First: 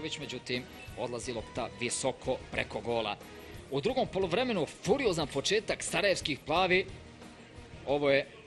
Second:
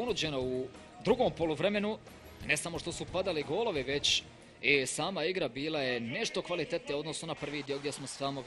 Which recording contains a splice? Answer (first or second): first